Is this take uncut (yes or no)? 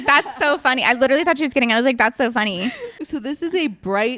no